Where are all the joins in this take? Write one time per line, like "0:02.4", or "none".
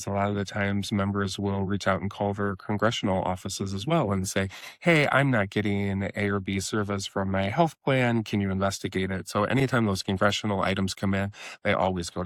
none

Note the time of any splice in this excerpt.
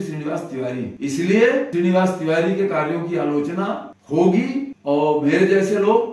0:00.9
0:01.7
0:03.9
0:04.7

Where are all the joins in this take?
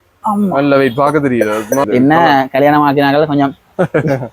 0:01.9

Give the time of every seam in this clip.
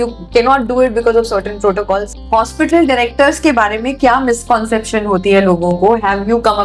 0:02.1

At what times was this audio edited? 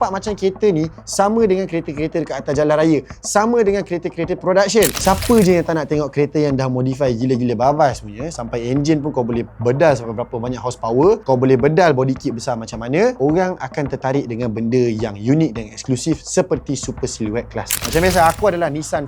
0:04.9
0:17.8

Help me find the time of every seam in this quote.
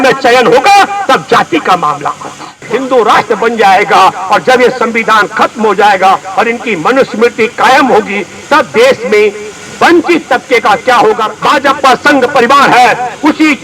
0:02.6
0:11.3

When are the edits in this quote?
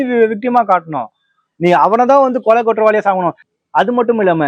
0:03.4

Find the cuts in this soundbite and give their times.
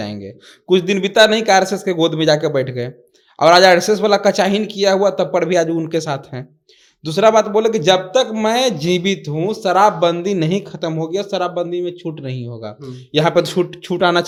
none

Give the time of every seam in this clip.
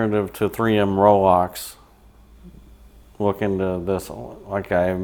none

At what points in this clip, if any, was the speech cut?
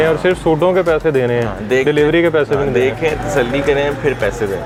none

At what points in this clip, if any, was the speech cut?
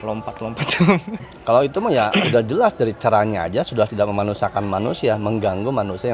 0:01.2

